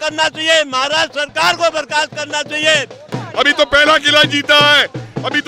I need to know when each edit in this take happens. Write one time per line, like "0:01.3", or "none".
0:03.1